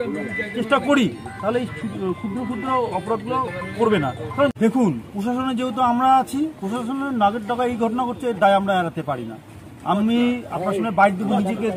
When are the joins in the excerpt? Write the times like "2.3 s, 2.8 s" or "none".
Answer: 4.5 s